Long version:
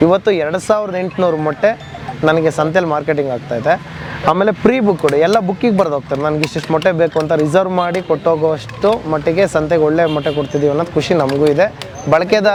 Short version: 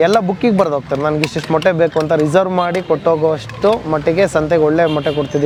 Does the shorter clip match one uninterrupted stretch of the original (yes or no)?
yes